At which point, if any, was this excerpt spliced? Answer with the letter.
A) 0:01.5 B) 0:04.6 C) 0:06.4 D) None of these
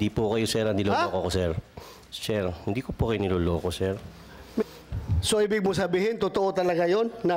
B